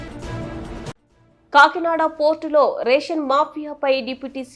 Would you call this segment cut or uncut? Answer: uncut